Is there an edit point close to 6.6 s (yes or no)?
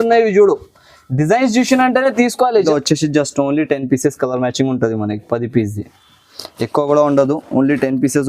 no